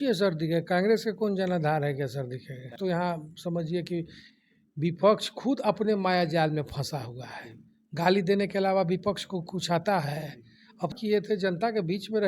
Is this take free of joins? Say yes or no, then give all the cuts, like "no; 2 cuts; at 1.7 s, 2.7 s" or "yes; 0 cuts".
no; 2 cuts; at 2.7 s, 11.0 s